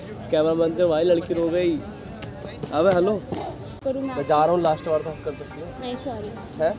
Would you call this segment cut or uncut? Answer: cut